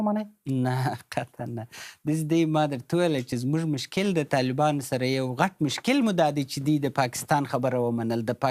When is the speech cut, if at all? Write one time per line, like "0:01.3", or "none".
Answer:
none